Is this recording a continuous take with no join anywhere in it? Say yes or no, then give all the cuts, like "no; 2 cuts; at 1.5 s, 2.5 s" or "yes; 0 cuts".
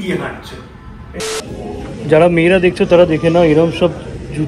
no; 1 cut; at 1.2 s